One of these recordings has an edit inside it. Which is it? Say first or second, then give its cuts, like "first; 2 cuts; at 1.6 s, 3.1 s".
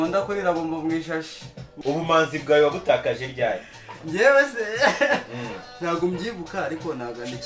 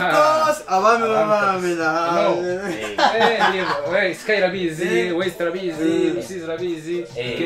first; 1 cut; at 1.8 s